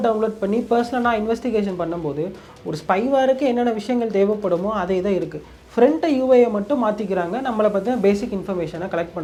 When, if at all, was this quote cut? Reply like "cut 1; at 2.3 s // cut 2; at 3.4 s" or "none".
none